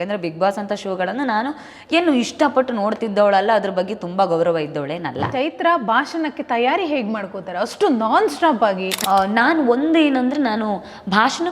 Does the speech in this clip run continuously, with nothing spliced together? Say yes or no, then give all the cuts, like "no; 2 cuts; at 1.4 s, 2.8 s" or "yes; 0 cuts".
no; 2 cuts; at 5.3 s, 8.9 s